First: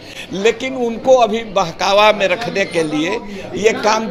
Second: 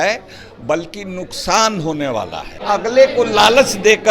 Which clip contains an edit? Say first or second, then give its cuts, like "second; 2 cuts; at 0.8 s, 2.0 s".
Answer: second; 1 cut; at 2.6 s